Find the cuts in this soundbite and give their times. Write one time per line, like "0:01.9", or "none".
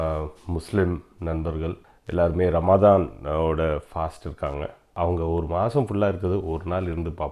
0:01.9
0:04.9